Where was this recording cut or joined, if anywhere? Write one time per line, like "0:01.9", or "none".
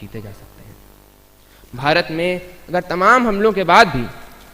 0:01.6